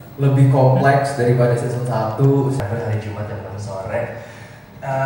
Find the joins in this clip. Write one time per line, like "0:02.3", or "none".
0:02.6